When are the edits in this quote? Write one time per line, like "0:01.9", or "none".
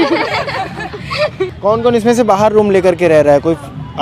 0:01.5